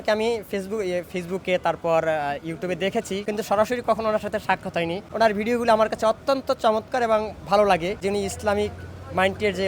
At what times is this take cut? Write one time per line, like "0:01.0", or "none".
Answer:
0:03.2
0:05.0
0:08.0